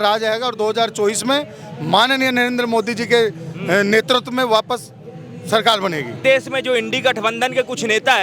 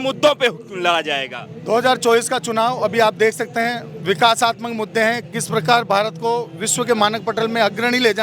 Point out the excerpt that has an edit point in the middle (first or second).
first